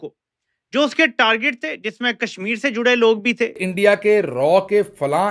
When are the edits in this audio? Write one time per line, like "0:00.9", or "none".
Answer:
0:03.7